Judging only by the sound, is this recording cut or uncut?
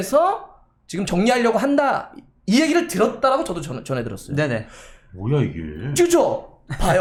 uncut